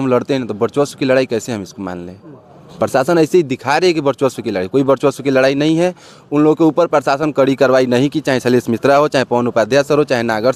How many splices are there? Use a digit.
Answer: 0